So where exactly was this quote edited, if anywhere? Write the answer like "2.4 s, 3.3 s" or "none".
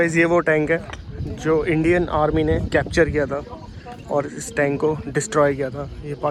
none